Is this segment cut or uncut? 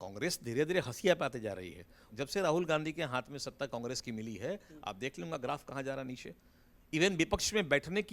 cut